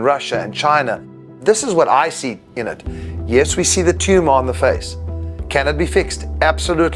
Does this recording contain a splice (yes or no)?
no